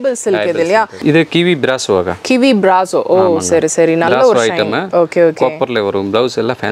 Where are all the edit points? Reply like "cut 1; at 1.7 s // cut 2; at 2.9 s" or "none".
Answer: cut 1; at 1.0 s